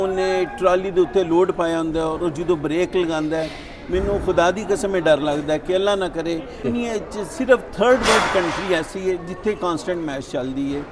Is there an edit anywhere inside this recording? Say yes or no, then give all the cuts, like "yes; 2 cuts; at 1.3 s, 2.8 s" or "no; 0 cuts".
yes; 1 cut; at 6.6 s